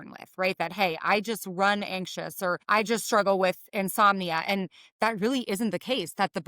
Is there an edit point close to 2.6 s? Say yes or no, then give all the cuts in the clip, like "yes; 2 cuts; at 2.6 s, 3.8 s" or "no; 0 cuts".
yes; 1 cut; at 2.6 s